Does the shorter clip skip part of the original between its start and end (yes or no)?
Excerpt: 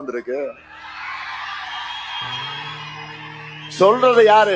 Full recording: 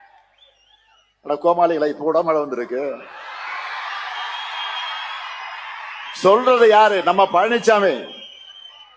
no